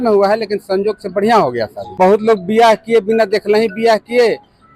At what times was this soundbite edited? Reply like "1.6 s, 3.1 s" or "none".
2.0 s

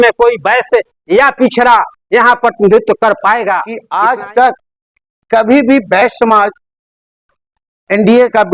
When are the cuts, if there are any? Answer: 3.8 s

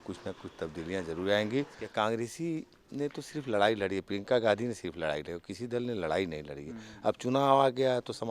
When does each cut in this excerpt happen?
1.8 s

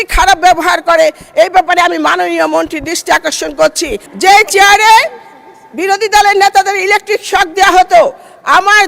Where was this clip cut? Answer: 4.0 s

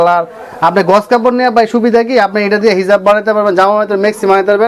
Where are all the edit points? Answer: none

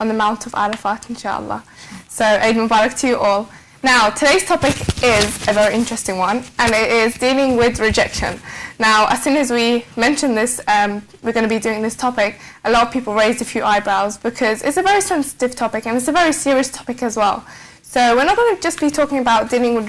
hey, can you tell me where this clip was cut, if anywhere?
15.2 s

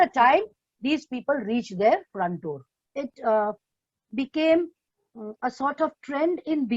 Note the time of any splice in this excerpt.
2.8 s

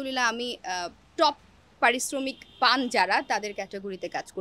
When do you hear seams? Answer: none

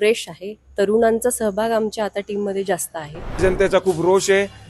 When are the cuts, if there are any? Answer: 3.4 s

